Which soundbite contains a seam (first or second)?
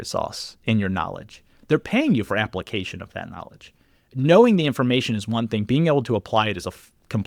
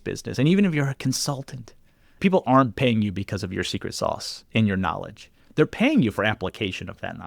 second